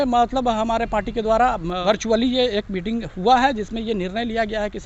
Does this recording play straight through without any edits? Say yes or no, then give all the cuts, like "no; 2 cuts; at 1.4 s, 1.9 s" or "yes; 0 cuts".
no; 1 cut; at 1.8 s